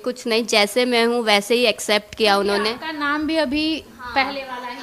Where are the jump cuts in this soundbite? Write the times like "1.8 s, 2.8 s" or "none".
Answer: none

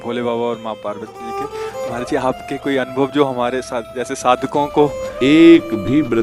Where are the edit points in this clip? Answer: 5.0 s

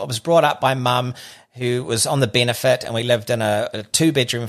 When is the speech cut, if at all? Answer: none

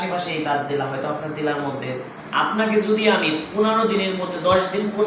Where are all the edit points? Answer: 2.1 s

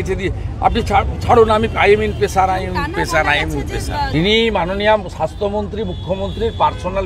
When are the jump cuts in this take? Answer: 4.1 s

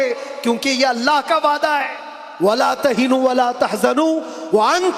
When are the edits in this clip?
none

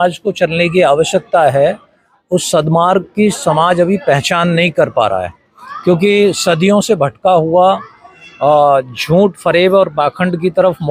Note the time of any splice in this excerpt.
none

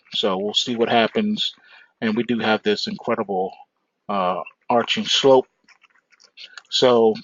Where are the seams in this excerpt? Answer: none

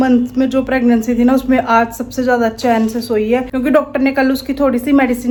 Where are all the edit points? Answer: none

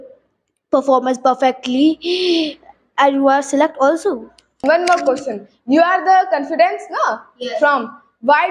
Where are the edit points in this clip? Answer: 4.6 s

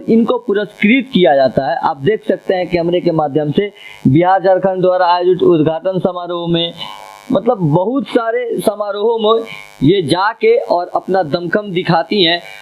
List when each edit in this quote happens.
none

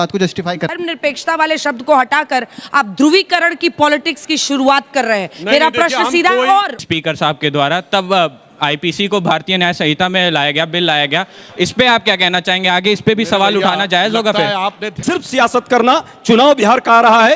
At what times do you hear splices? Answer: 0.8 s, 6.7 s, 14.9 s

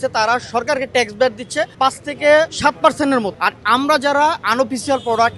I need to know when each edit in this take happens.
1.7 s, 2.5 s, 3.3 s

